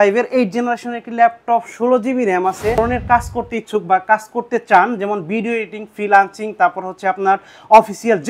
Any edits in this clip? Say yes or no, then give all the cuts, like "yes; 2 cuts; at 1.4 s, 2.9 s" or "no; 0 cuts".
yes; 1 cut; at 2.8 s